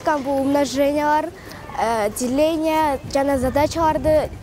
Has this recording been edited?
no; 0 cuts

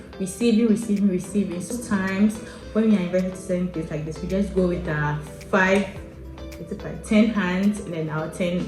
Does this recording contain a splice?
yes; 1 cut; at 1.7 s

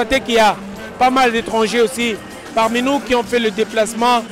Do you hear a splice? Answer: no; 0 cuts

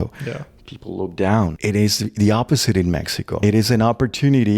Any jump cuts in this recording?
yes; 2 cuts; at 1.6 s, 3.3 s

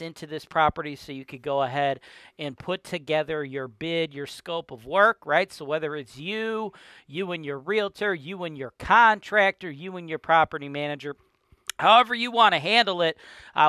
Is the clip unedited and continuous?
yes; 0 cuts

